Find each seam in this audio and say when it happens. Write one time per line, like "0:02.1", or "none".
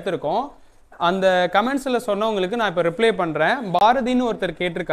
none